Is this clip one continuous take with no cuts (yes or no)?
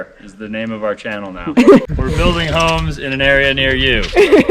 no